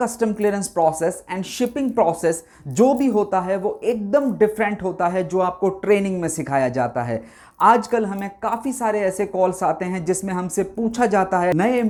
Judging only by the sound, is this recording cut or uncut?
uncut